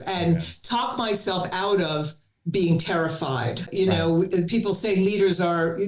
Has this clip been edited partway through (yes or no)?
yes